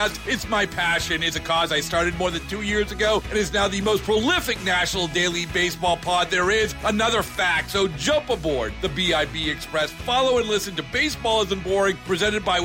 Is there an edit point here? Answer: no; 0 cuts

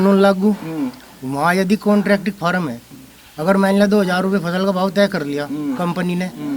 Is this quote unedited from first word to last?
yes; 0 cuts

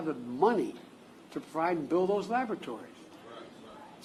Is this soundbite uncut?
yes; 0 cuts

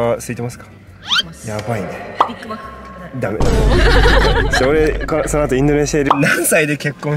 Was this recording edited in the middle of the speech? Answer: yes; 1 cut; at 6.1 s

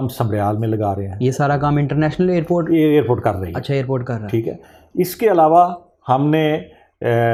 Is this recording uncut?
yes; 0 cuts

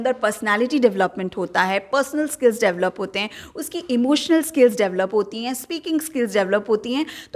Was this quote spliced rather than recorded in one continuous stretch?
no; 0 cuts

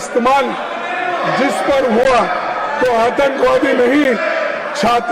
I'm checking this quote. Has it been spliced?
no; 0 cuts

